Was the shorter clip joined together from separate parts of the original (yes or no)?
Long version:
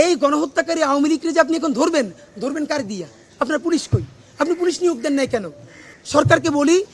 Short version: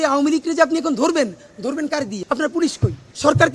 yes